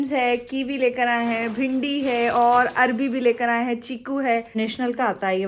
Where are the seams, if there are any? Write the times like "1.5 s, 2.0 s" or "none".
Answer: 4.5 s

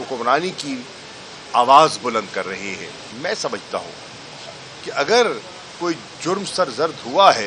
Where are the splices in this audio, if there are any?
3.0 s

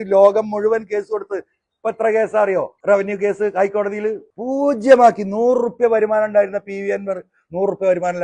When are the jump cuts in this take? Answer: 2.7 s, 4.3 s

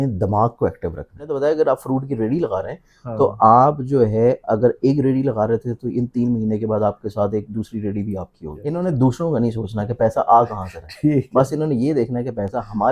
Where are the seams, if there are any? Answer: 1.3 s, 8.6 s

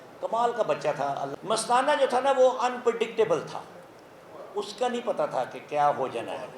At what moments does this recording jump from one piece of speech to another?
1.2 s

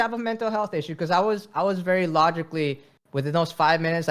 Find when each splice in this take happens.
none

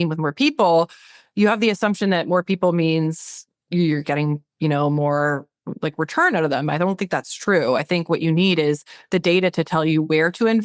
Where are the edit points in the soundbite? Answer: none

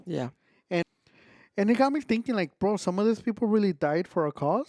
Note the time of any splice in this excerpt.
0.9 s

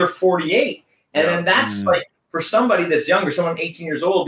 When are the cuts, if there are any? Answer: none

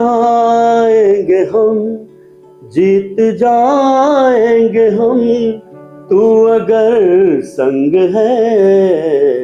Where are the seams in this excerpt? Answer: none

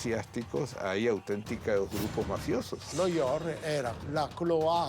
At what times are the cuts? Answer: 2.9 s, 4.0 s

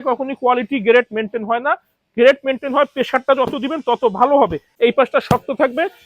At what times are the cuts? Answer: 4.6 s

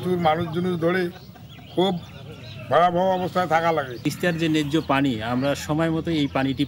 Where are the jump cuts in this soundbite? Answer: 4.0 s

